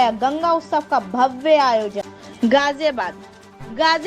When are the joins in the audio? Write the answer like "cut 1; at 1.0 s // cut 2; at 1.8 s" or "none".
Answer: cut 1; at 2.0 s

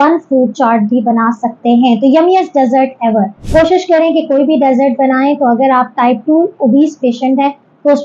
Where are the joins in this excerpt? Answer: cut 1; at 3.4 s

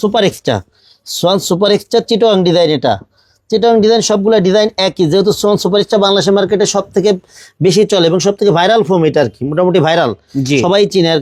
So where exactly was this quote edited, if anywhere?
none

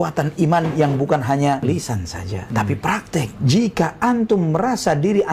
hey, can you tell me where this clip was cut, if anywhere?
cut 1; at 1.6 s // cut 2; at 3.4 s

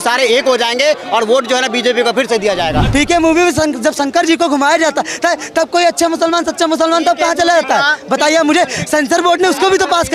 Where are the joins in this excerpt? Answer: cut 1; at 2.8 s

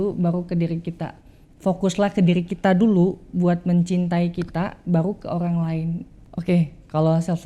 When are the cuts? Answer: cut 1; at 6.1 s

